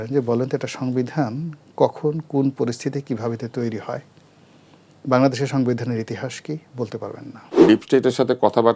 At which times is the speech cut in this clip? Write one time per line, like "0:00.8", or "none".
0:07.5